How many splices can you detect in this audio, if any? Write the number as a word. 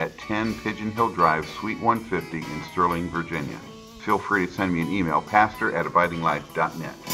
one